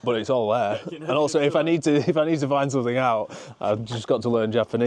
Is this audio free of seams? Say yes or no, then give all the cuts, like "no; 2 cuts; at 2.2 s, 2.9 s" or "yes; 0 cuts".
yes; 0 cuts